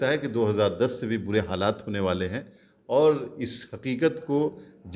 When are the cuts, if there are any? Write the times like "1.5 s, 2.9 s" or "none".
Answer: none

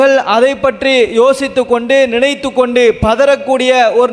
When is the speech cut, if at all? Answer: none

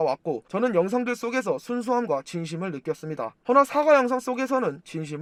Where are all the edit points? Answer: none

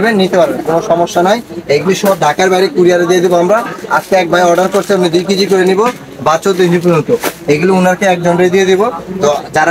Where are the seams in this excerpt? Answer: none

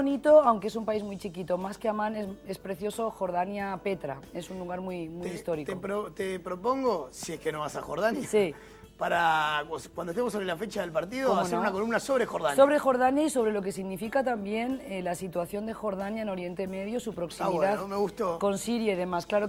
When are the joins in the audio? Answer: none

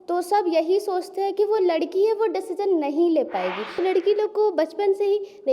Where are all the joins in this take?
3.7 s

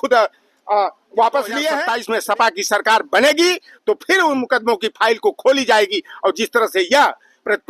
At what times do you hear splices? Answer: 1.9 s

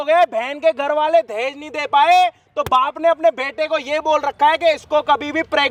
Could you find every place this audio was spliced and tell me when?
none

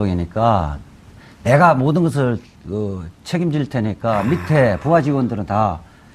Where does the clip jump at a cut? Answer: 4.3 s

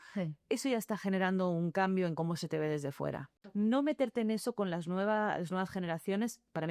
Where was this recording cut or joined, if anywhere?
3.3 s

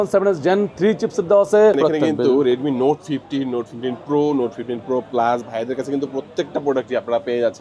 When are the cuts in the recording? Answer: 1.8 s

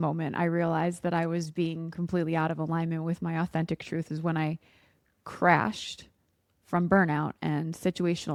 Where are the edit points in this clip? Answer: none

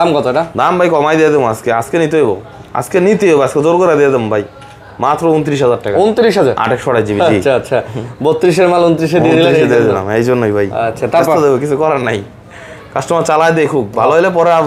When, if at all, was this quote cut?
none

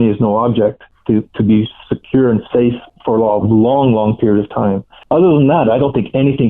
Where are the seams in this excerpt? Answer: 0.9 s, 2.9 s, 4.9 s

